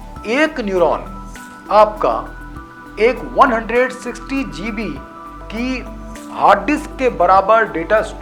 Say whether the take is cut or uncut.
uncut